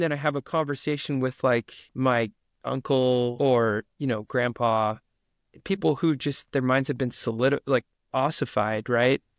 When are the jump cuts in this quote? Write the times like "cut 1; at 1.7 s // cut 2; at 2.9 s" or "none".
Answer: cut 1; at 1.8 s // cut 2; at 3.3 s // cut 3; at 8.0 s